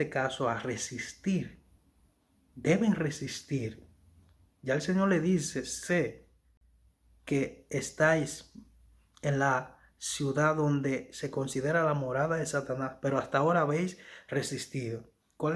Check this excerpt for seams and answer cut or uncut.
uncut